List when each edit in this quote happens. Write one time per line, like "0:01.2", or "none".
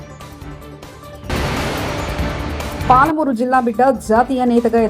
0:02.8